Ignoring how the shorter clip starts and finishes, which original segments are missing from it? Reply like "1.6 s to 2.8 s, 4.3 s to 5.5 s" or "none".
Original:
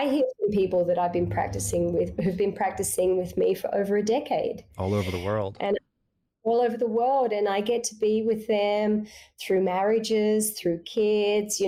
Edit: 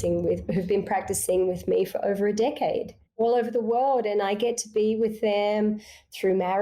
4.7 s to 6.2 s